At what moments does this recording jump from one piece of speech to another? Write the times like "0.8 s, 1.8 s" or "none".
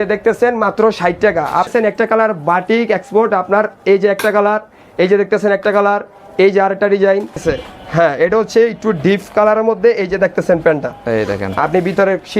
1.7 s, 7.4 s